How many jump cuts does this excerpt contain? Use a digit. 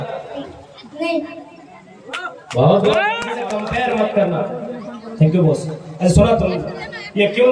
1